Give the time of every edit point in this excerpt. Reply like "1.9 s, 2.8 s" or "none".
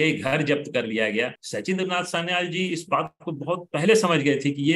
1.4 s